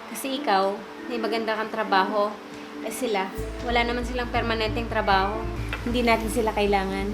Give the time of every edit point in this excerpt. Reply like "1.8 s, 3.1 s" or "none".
5.6 s

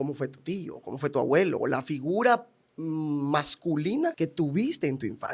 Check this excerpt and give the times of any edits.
4.1 s

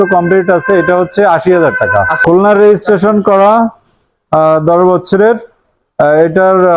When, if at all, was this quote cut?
2.2 s

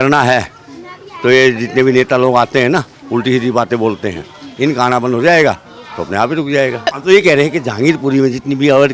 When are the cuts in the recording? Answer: 6.9 s

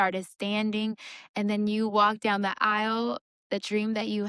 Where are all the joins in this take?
none

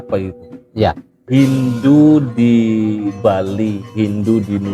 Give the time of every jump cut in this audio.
1.1 s

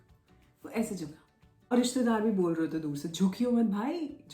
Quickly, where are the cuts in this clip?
1.7 s

